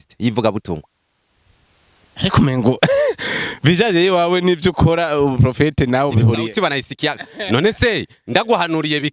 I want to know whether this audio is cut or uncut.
uncut